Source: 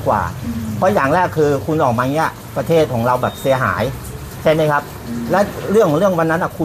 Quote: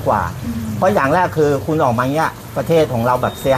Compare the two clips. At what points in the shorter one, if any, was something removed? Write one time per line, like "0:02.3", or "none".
none

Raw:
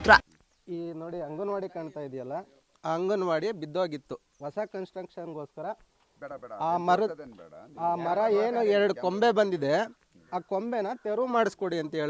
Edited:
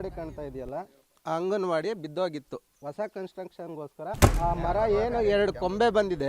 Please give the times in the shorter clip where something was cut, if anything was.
0:04.2

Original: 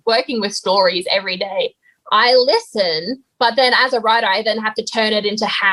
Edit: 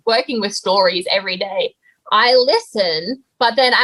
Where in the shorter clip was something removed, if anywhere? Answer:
none

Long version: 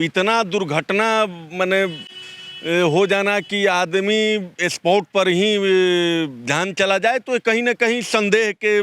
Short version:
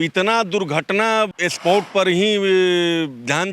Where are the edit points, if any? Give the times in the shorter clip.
0:01.4

